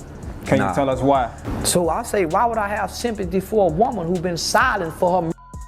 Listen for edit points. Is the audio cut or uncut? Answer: cut